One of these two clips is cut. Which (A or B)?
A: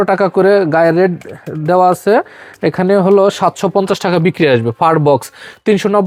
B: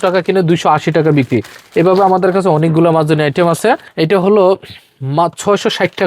B